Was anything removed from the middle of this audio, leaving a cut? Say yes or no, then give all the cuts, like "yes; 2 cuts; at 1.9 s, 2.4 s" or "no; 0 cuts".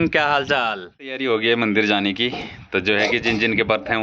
yes; 1 cut; at 1.2 s